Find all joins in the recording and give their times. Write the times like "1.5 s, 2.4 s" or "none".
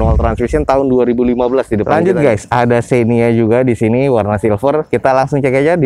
1.9 s

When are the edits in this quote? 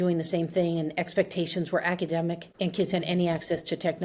none

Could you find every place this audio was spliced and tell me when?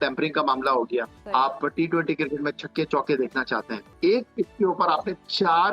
1.2 s, 3.9 s

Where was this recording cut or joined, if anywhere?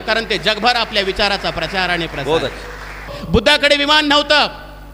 3.2 s

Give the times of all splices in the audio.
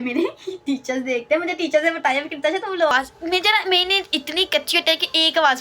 2.9 s

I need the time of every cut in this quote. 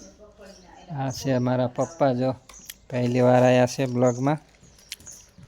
none

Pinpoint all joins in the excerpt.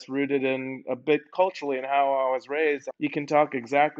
2.9 s

